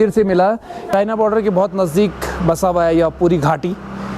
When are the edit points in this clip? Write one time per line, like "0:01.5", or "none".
0:00.9